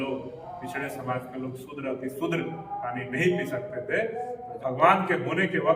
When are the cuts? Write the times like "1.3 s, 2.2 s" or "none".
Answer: 4.4 s